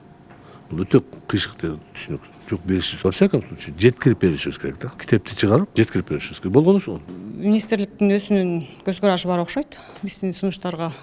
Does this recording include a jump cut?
yes; 4 cuts; at 2.9 s, 4.9 s, 5.7 s, 7.0 s

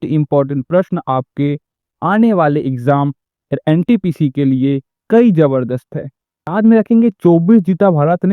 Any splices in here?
yes; 1 cut; at 6.5 s

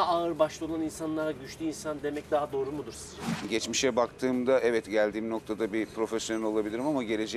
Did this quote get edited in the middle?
yes; 1 cut; at 3.5 s

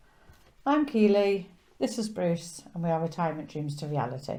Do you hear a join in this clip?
no; 0 cuts

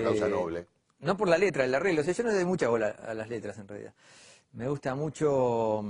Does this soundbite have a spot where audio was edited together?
no; 0 cuts

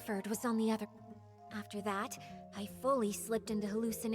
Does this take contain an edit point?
yes; 1 cut; at 0.9 s

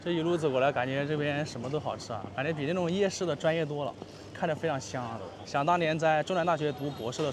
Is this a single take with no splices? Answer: no; 1 cut; at 5.3 s

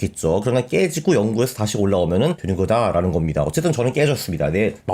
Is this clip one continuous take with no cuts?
no; 1 cut; at 2.4 s

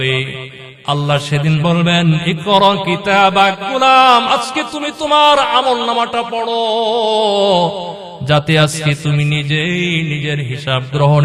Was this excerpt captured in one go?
yes; 0 cuts

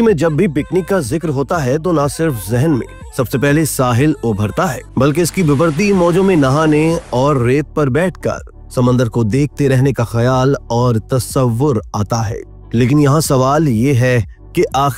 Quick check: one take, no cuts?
yes; 0 cuts

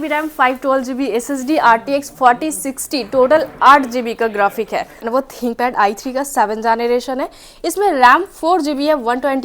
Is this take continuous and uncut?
no; 1 cut; at 5.1 s

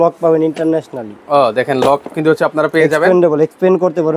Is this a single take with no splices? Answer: yes; 0 cuts

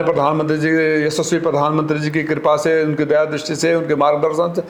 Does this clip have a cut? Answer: no; 0 cuts

